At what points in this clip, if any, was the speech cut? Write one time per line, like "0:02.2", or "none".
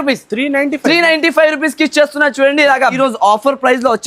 0:03.0